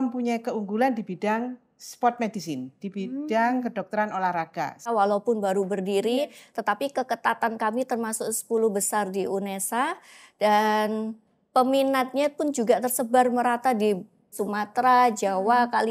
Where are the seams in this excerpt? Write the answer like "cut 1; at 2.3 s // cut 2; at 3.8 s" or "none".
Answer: cut 1; at 4.8 s // cut 2; at 14.4 s